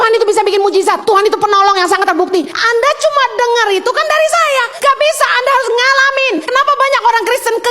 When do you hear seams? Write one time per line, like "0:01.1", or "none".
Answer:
0:01.0
0:02.6
0:04.7
0:06.4